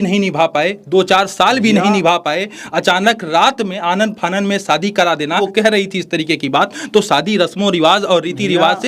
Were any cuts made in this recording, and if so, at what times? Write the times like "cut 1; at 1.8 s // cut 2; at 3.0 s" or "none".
cut 1; at 5.4 s